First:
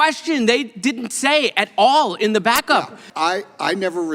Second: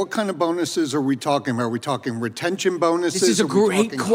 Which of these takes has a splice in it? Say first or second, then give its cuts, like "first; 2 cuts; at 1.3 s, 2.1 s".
first; 1 cut; at 3.0 s